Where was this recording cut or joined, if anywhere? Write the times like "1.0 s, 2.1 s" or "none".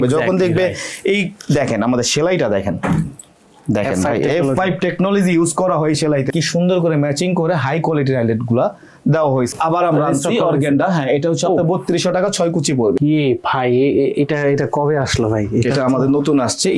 6.3 s, 9.5 s, 13.0 s